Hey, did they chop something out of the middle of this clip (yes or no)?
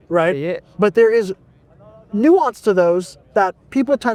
no